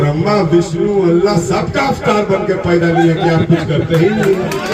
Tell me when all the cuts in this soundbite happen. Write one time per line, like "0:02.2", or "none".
none